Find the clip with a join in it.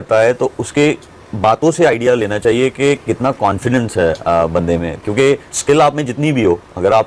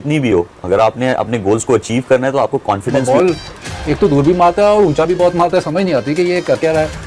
second; 1 cut; at 3.0 s

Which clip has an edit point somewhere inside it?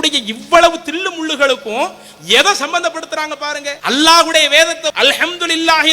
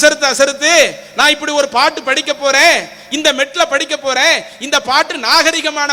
first; 2 cuts; at 3.7 s, 4.9 s

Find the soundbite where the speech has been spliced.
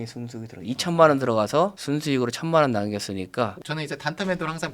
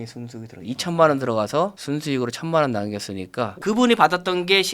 second; 1 cut; at 3.6 s

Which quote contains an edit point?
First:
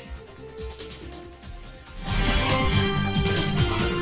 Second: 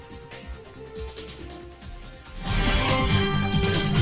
first; 2 cuts; at 1.3 s, 2.7 s

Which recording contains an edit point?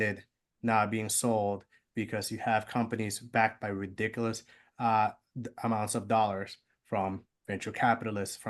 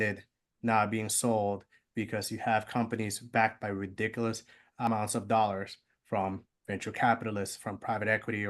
second; 1 cut; at 4.9 s

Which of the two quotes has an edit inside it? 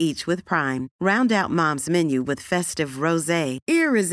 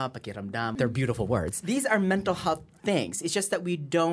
second; 2 cuts; at 0.7 s, 1.6 s

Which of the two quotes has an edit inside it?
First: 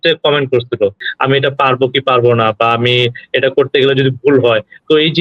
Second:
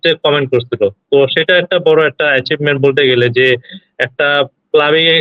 first; 1 cut; at 1.0 s

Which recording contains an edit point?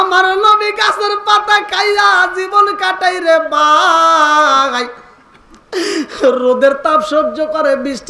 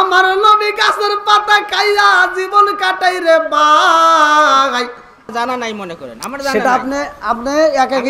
second; 1 cut; at 5.3 s

